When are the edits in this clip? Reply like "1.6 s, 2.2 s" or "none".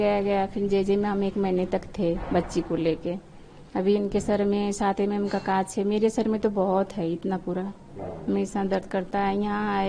none